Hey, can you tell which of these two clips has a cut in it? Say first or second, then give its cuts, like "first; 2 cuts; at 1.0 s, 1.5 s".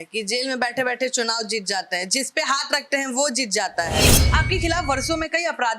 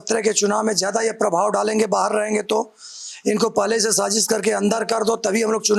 first; 1 cut; at 4.2 s